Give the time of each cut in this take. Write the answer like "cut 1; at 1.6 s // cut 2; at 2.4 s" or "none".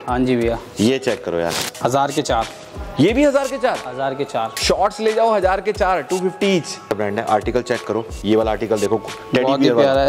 cut 1; at 1.7 s // cut 2; at 6.9 s

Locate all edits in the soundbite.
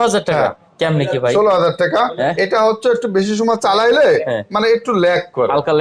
none

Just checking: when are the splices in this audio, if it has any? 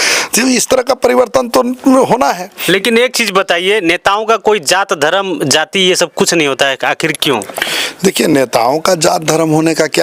none

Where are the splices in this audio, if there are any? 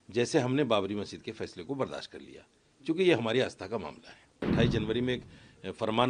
cut 1; at 4.4 s

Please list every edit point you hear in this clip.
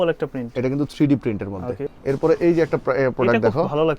cut 1; at 1.9 s

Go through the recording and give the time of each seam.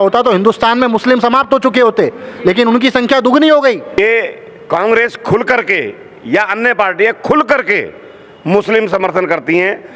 cut 1; at 3.9 s

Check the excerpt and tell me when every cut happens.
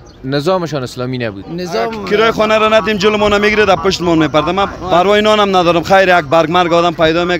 cut 1; at 2.0 s // cut 2; at 4.8 s

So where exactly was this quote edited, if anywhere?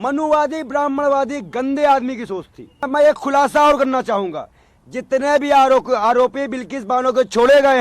cut 1; at 2.8 s

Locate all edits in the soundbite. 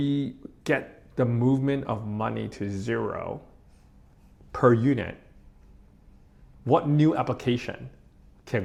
none

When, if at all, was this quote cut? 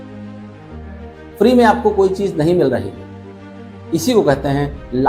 cut 1; at 1.4 s

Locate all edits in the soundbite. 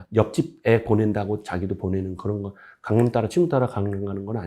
none

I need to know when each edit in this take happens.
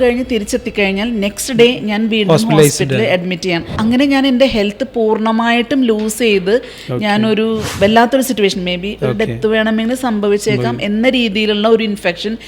cut 1; at 3.8 s // cut 2; at 7.7 s

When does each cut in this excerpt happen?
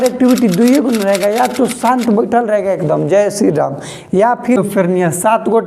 cut 1; at 4.6 s

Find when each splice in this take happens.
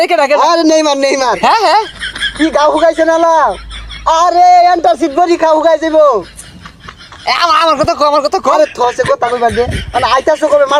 none

